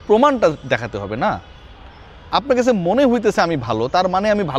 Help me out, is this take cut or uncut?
uncut